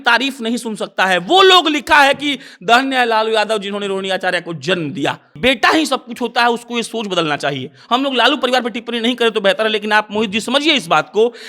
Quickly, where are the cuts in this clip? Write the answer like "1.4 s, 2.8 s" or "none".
5.3 s